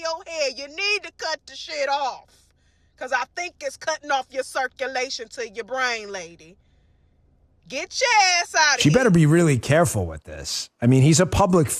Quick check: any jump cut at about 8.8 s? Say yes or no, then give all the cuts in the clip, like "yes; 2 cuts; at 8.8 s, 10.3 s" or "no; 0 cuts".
yes; 1 cut; at 8.8 s